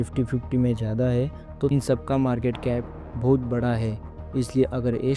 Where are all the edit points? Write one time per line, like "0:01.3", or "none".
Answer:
0:01.7